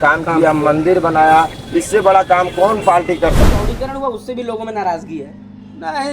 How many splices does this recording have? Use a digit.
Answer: 1